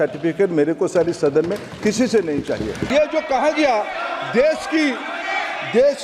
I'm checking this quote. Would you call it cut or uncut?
cut